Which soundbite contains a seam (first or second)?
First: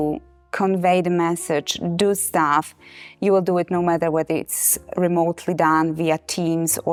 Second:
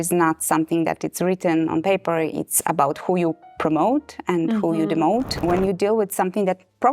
second